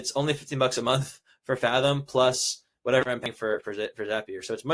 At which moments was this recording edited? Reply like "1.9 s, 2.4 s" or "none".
3.2 s